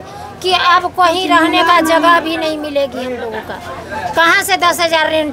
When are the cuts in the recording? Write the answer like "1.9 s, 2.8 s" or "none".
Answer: none